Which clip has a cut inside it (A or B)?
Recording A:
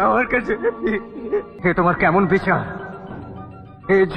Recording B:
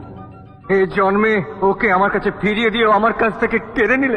A